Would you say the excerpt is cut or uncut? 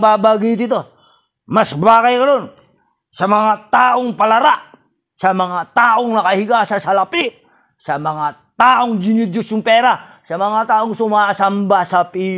uncut